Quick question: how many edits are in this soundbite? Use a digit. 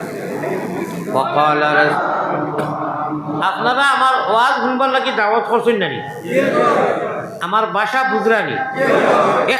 1